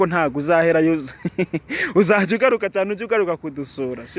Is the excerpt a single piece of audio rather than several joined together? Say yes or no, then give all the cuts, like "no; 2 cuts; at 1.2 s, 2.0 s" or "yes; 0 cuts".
yes; 0 cuts